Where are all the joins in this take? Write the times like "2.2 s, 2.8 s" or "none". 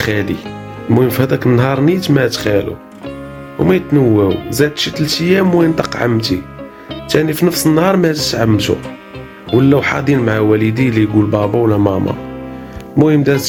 none